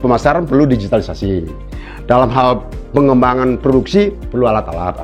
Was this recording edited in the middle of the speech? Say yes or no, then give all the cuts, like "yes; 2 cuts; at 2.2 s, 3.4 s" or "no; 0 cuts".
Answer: no; 0 cuts